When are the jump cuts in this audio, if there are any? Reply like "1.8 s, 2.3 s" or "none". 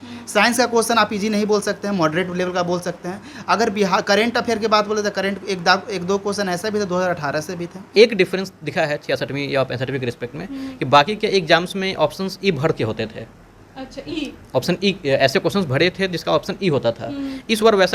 7.9 s